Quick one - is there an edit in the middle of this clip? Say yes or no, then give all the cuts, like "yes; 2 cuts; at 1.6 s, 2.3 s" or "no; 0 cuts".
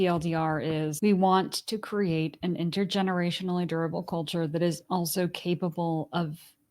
yes; 1 cut; at 0.9 s